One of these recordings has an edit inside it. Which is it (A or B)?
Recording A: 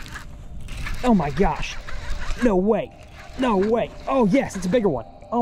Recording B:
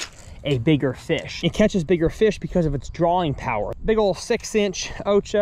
B